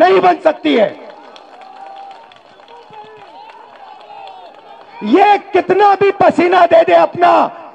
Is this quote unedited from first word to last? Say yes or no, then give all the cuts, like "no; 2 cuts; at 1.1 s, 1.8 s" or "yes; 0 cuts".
yes; 0 cuts